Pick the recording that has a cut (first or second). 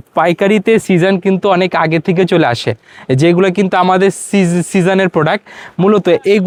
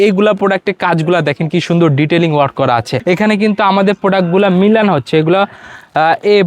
second